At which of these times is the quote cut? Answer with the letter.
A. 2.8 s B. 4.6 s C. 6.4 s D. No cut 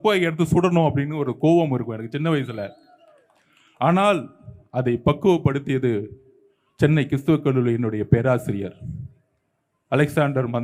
D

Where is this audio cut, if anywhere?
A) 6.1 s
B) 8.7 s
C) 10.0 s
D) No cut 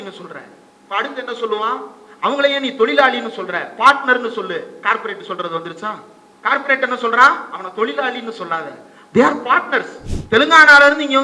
C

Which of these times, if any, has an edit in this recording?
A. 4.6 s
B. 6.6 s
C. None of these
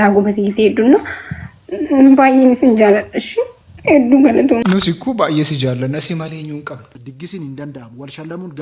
A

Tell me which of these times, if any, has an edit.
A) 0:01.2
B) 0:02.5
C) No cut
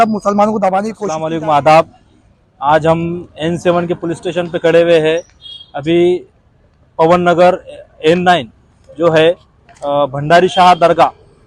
A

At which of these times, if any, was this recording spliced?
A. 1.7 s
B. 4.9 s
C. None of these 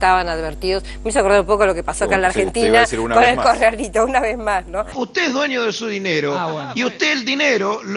B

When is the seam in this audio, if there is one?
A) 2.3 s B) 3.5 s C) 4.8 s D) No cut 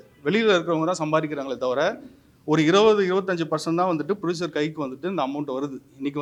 D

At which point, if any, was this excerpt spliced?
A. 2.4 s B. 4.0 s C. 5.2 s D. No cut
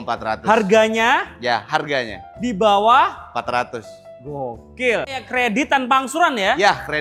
C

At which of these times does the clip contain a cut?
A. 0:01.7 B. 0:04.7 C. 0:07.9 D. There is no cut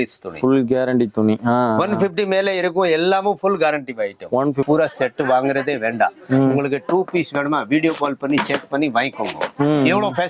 B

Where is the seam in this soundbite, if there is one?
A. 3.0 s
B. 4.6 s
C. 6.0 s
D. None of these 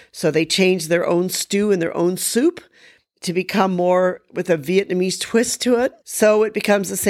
C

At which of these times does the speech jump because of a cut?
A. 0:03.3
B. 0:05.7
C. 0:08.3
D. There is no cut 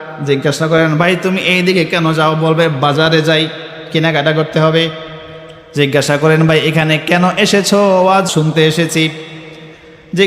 C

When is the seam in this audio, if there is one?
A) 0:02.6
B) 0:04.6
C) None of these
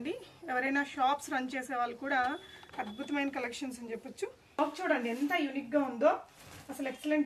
B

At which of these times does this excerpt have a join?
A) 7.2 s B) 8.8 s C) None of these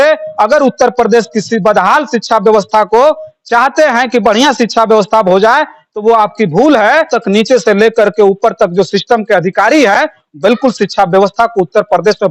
A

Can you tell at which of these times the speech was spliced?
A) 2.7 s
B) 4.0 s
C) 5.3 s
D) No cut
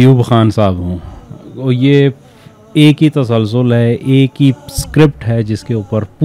D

